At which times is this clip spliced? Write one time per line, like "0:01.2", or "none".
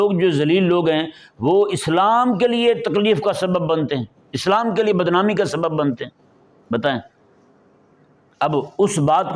none